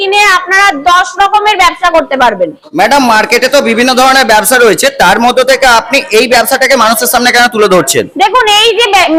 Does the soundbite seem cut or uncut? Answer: uncut